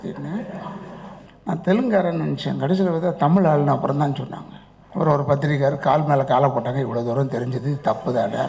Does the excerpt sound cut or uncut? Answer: cut